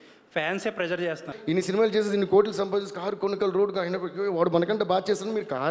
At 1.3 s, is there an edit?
yes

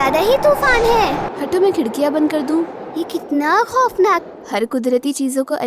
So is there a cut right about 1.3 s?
yes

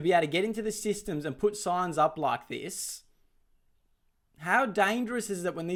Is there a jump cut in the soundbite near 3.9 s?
no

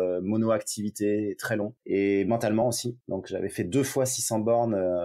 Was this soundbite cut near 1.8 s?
yes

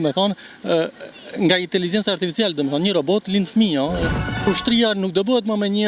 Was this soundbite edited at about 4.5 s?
yes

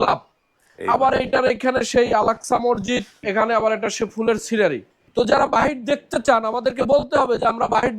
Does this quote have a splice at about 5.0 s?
yes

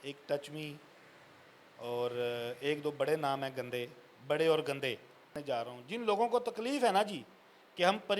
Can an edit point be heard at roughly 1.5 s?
no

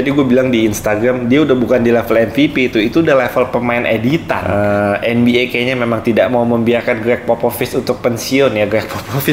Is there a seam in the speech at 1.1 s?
no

